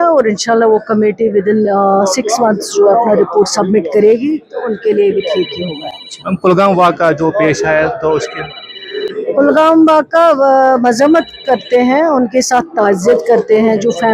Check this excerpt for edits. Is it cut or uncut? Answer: uncut